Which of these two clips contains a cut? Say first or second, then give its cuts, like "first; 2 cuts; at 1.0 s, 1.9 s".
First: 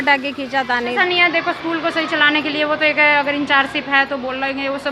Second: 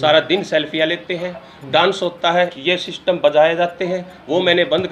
first; 1 cut; at 1.0 s